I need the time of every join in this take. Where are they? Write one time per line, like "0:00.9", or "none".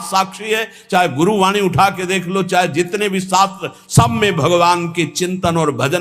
none